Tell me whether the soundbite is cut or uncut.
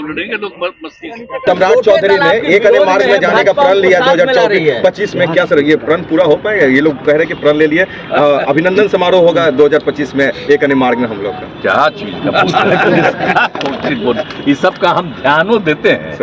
cut